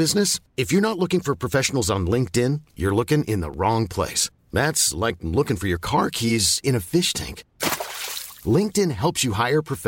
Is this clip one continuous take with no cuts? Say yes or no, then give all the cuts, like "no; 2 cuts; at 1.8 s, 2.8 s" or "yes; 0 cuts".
yes; 0 cuts